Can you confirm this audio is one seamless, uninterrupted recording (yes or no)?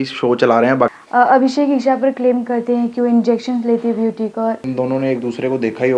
no